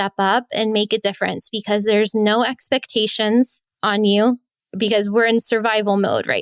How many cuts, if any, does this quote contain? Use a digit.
2